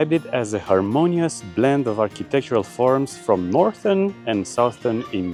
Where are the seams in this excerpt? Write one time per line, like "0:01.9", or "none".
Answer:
none